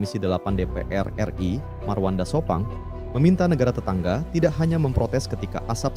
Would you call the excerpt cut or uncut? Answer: uncut